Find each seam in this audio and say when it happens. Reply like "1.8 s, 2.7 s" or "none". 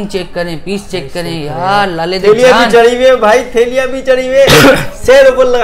none